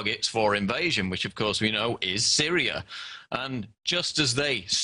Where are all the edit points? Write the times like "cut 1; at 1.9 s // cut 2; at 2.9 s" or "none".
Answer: none